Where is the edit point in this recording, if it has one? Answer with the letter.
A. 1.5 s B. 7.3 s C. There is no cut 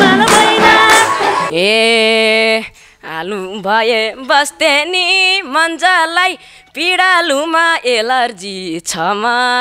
A